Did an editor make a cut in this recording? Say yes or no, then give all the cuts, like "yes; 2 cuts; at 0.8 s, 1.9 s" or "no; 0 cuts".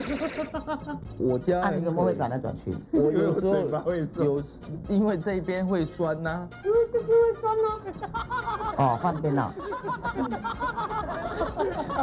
yes; 1 cut; at 1.0 s